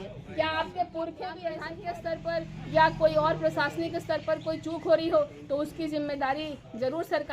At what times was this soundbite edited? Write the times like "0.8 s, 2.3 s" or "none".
1.6 s